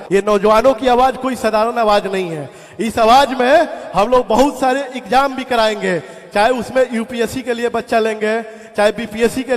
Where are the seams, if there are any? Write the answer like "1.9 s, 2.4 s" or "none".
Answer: none